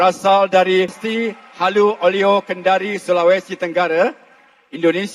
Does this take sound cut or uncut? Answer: cut